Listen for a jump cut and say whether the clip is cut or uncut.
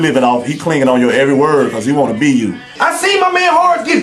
cut